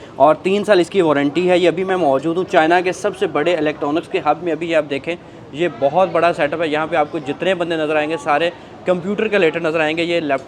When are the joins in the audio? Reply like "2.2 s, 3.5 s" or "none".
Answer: none

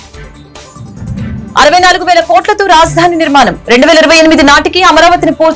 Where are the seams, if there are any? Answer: 1.2 s

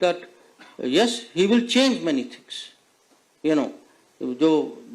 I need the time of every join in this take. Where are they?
none

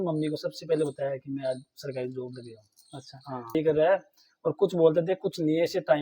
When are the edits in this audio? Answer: 3.5 s

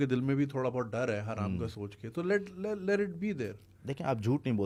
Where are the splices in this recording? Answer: none

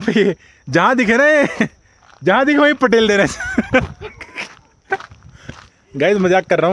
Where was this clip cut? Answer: none

